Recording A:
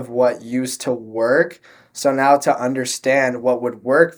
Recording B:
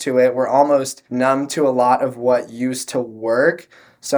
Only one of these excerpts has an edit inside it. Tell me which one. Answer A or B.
B